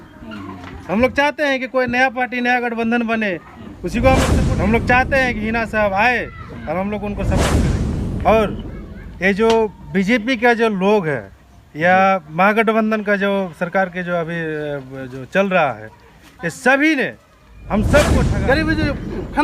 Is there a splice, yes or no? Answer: yes